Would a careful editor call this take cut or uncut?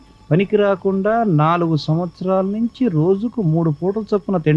uncut